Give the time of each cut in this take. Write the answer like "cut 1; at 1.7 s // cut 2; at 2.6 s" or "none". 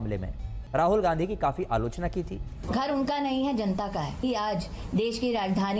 cut 1; at 2.5 s // cut 2; at 4.2 s